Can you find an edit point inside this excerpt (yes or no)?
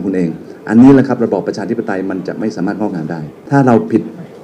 yes